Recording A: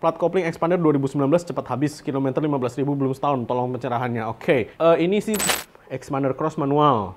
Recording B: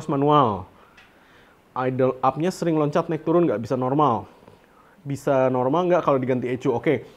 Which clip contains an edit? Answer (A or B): A